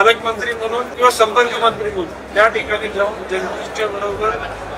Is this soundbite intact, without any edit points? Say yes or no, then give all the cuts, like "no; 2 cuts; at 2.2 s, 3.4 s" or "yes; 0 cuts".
no; 1 cut; at 0.9 s